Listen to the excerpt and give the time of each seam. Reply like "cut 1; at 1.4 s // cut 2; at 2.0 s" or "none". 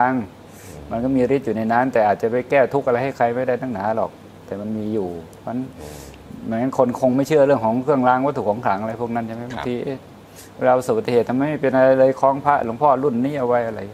none